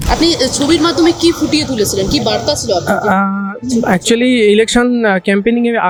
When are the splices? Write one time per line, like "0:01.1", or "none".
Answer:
none